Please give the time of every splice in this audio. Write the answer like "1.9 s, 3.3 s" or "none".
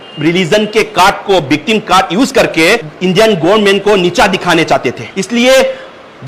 5.1 s